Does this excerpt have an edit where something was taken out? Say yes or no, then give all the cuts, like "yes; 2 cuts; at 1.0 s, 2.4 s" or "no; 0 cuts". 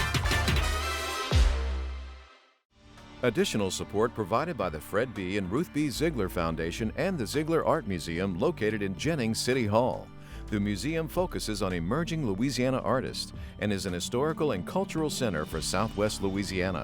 yes; 1 cut; at 3.1 s